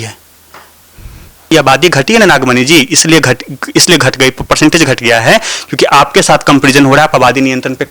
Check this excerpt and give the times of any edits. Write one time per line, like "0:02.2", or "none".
0:01.5